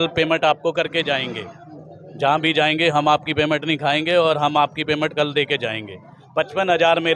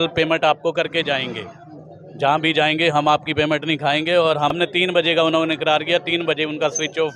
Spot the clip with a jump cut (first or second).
second